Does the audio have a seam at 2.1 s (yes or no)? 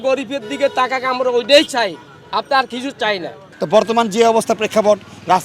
no